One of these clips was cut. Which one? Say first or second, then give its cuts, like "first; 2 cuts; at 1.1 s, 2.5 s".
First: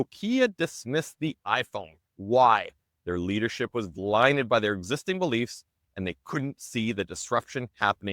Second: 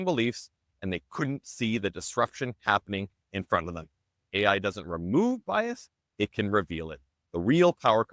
second; 1 cut; at 4.2 s